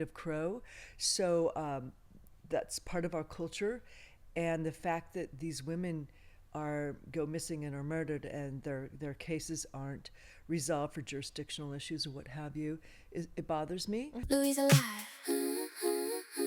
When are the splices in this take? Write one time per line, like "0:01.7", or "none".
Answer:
0:14.2